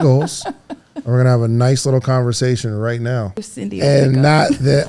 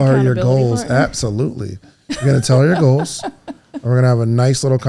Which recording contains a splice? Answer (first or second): first